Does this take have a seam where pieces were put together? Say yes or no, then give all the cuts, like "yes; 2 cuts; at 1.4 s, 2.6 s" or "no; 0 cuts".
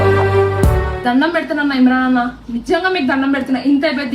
yes; 1 cut; at 1.0 s